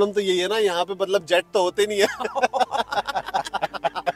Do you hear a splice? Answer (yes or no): no